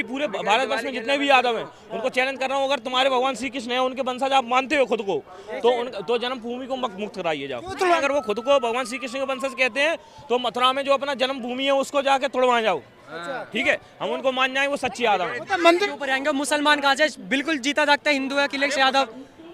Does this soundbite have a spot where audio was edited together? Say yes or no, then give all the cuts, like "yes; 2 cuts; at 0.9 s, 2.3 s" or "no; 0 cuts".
yes; 2 cuts; at 8.0 s, 15.9 s